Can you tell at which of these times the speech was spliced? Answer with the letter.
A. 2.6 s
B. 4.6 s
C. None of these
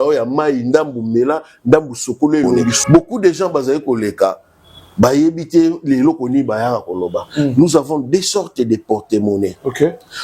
A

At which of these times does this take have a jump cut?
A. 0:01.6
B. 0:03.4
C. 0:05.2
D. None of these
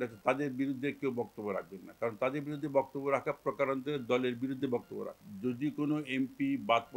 C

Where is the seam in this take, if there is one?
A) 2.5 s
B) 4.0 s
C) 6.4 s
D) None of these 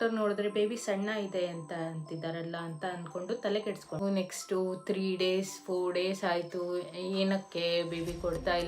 B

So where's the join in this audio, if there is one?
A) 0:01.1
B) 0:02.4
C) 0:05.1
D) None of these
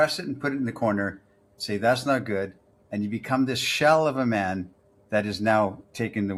D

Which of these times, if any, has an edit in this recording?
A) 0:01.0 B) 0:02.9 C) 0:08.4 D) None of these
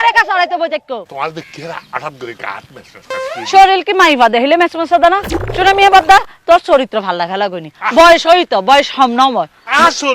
A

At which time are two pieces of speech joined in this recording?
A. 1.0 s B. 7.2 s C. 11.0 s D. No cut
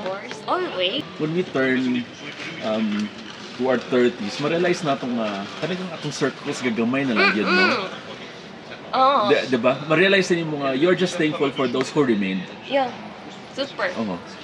A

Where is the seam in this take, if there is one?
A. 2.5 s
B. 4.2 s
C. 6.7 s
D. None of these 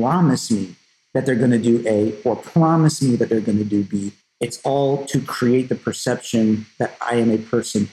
B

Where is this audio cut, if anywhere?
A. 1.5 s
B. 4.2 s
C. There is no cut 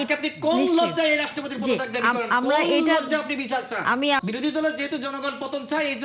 B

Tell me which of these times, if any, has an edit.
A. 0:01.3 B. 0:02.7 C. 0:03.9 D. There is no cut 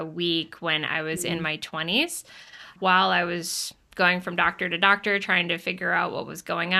B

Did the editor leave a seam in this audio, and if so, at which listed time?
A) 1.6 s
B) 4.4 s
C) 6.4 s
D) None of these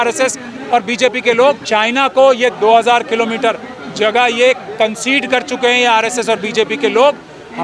A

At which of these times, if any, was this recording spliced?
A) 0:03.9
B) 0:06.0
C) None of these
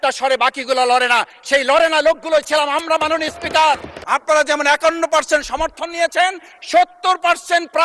A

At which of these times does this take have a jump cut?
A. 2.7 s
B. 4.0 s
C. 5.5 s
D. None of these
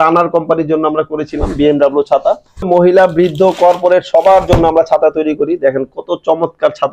A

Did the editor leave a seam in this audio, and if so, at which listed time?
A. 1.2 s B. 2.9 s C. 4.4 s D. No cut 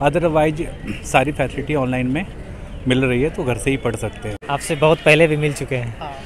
C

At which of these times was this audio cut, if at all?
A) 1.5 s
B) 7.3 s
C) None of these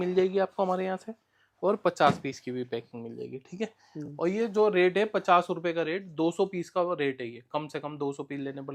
C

